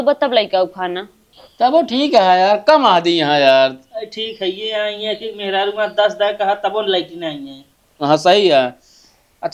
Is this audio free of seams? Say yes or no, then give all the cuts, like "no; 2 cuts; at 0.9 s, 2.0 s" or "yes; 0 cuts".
no; 1 cut; at 1.0 s